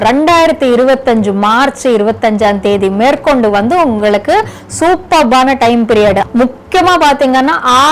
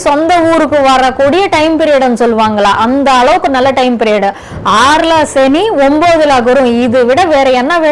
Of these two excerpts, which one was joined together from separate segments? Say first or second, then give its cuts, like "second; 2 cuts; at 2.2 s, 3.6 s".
first; 1 cut; at 6.3 s